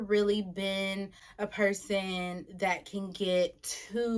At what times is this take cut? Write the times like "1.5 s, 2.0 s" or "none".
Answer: 1.2 s